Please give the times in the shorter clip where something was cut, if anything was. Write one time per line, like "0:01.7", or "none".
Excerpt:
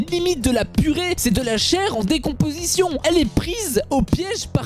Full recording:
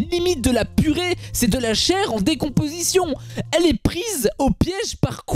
0:01.2
0:03.0